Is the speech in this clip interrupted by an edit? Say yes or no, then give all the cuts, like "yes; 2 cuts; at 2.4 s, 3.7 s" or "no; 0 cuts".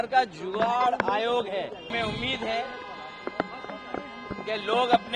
yes; 1 cut; at 1.9 s